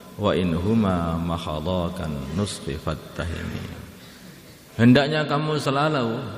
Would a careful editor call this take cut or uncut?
cut